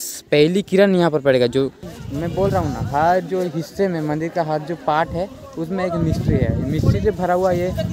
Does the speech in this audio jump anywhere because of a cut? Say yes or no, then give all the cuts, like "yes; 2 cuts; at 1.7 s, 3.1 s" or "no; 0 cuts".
yes; 1 cut; at 1.9 s